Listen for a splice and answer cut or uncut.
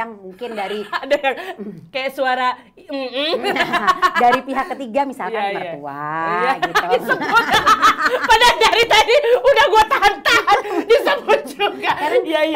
uncut